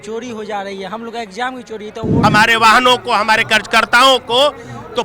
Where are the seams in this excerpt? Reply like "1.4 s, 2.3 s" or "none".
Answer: 2.2 s